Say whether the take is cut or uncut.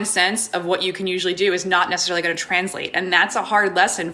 uncut